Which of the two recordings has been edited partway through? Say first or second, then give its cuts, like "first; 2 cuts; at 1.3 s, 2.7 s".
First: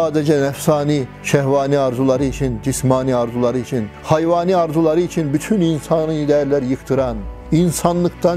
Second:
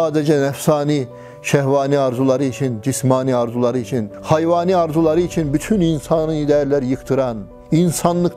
first; 1 cut; at 1.1 s